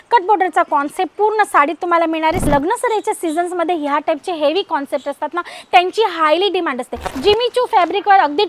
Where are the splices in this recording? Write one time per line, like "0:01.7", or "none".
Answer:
0:02.5
0:07.1